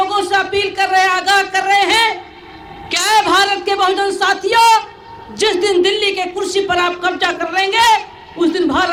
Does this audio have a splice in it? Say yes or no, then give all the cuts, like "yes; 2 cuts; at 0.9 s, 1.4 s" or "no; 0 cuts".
no; 0 cuts